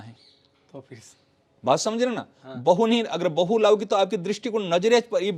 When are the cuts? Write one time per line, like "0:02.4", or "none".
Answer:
none